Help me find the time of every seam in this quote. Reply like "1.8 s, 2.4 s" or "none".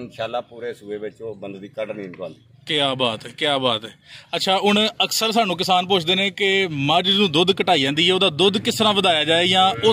none